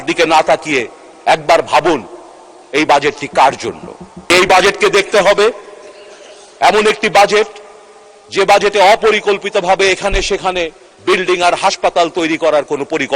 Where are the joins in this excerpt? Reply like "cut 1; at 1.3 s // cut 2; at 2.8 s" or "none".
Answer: cut 1; at 4.3 s

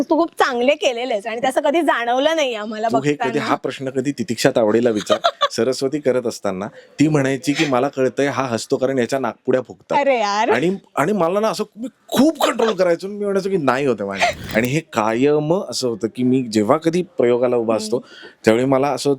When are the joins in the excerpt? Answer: cut 1; at 14.4 s

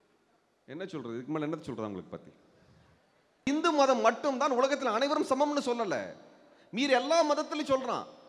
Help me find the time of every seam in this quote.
cut 1; at 3.5 s

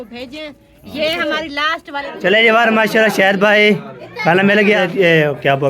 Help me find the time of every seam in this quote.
cut 1; at 2.1 s // cut 2; at 4.8 s

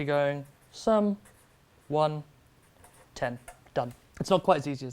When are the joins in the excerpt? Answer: cut 1; at 4.0 s

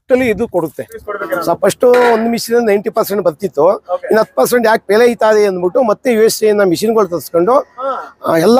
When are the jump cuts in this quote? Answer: cut 1; at 1.0 s

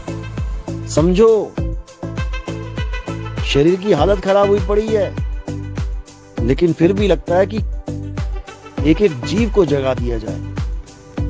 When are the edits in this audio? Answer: cut 1; at 1.5 s // cut 2; at 3.5 s // cut 3; at 5.1 s // cut 4; at 6.4 s

